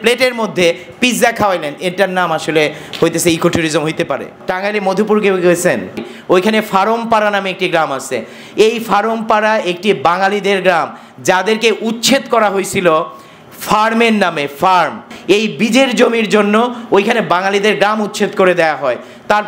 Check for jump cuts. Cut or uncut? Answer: cut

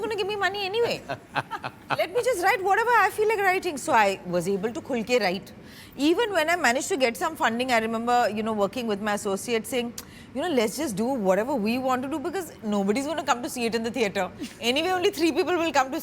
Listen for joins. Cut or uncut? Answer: uncut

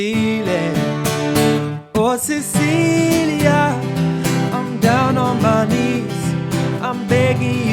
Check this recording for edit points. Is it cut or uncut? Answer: uncut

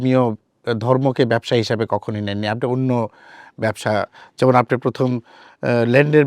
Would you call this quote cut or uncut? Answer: uncut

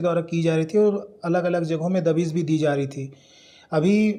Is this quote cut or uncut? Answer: uncut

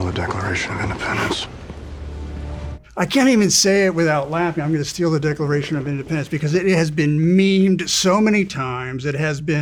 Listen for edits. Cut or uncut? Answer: uncut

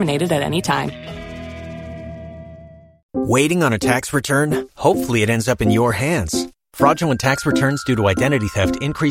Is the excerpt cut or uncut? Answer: cut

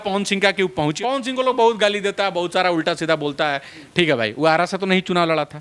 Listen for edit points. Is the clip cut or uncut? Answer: cut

